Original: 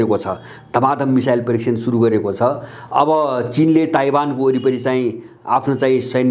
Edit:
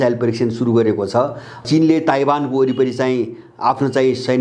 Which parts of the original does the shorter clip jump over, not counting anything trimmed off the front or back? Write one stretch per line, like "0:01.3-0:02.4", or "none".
0:02.9-0:03.5